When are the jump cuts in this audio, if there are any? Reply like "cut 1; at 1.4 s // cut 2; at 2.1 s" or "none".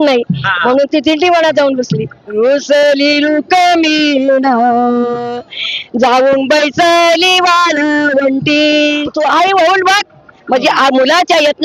cut 1; at 2.2 s // cut 2; at 9.1 s

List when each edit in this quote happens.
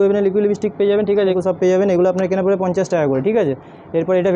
cut 1; at 1.3 s

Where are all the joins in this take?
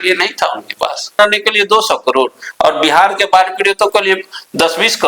cut 1; at 1.2 s

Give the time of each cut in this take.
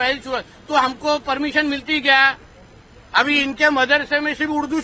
none

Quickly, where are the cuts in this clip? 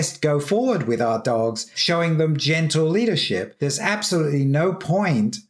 cut 1; at 1.7 s // cut 2; at 3.5 s

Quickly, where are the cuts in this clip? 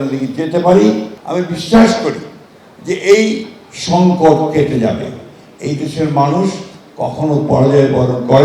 cut 1; at 1.1 s

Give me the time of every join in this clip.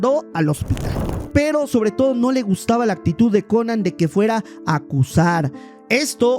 cut 1; at 1.1 s

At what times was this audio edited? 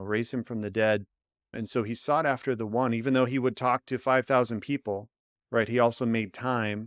none

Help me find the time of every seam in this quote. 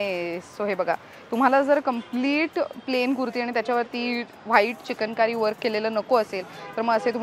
none

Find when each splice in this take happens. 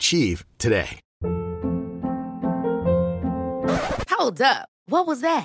cut 1; at 1.0 s

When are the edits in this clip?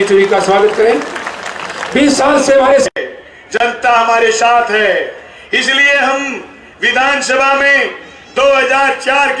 cut 1; at 2.9 s

